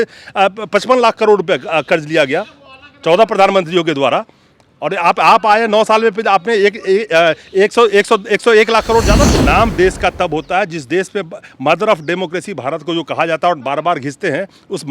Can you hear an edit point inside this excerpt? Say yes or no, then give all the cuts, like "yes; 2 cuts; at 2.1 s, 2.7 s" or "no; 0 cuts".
yes; 1 cut; at 9.2 s